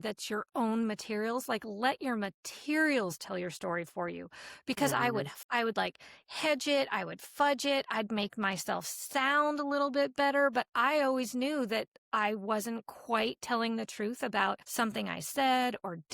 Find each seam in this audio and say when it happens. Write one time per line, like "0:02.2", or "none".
0:05.4
0:14.6